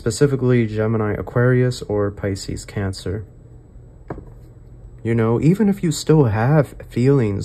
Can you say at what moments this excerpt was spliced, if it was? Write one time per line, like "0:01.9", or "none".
0:04.8